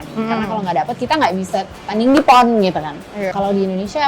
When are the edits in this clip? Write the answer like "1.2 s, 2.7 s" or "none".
3.2 s

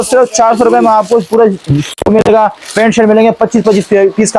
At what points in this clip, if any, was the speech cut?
none

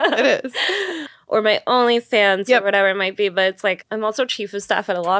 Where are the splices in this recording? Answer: 0.9 s, 3.8 s

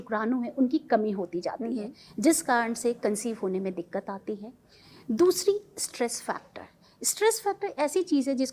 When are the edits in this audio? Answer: none

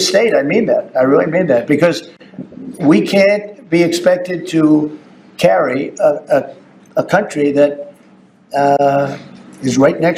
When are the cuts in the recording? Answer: none

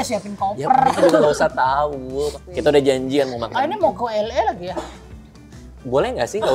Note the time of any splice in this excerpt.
2.4 s

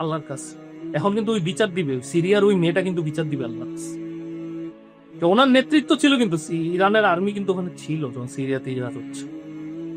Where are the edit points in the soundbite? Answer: 3.5 s, 5.2 s, 8.9 s

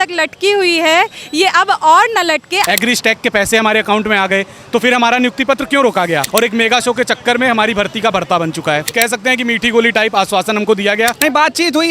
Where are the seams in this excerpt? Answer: 2.7 s, 6.2 s, 8.8 s, 11.2 s

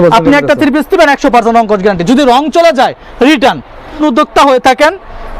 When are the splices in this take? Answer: 4.0 s

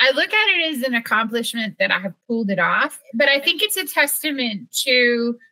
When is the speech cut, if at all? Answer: 3.0 s

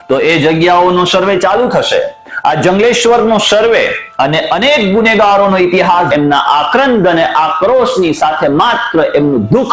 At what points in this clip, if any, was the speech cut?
6.1 s

